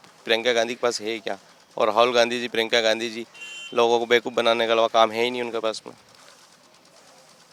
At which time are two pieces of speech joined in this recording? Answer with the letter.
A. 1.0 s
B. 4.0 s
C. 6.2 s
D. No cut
D